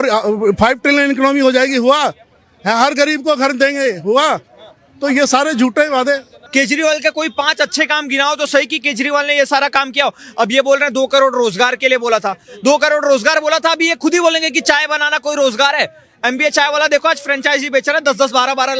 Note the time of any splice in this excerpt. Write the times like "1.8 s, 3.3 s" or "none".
6.4 s